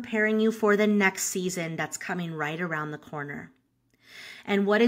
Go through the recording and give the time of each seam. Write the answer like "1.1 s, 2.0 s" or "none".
none

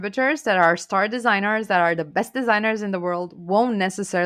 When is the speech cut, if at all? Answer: none

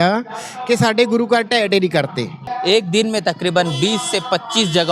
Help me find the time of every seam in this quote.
2.5 s

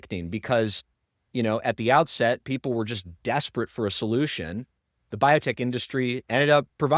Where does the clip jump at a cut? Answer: none

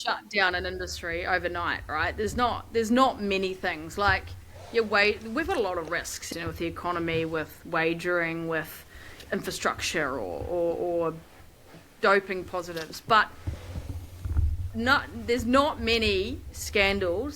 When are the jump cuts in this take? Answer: 6.2 s, 9.1 s, 11.7 s

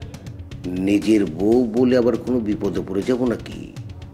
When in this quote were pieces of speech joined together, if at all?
none

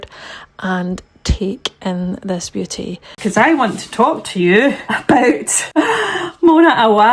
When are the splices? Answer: 3.1 s, 4.9 s, 5.5 s

